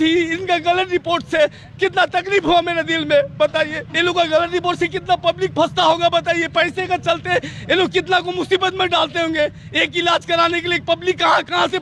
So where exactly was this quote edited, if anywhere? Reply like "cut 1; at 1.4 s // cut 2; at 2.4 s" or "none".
none